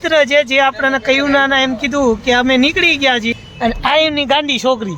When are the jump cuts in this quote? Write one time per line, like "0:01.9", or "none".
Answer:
0:03.4